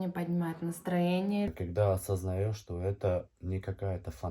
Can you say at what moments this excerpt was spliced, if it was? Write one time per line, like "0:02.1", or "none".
0:01.5